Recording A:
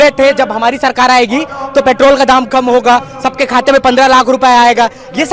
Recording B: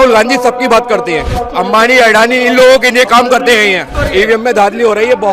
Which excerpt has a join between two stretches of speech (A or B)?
B